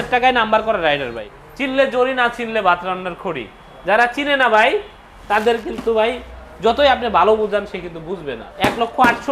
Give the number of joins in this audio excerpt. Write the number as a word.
two